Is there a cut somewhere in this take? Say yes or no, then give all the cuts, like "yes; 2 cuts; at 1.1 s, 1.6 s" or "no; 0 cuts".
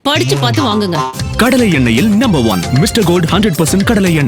no; 0 cuts